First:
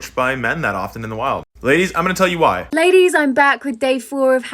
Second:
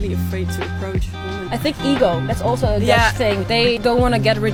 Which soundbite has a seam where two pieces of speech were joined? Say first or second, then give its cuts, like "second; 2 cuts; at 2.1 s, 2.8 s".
first; 1 cut; at 2.6 s